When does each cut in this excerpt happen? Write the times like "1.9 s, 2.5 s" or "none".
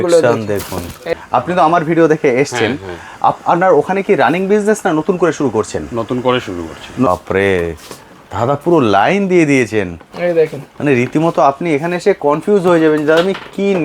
1.0 s, 7.1 s

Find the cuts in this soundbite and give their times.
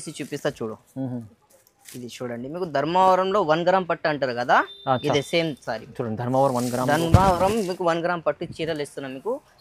none

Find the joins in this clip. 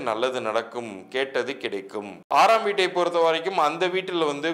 2.2 s

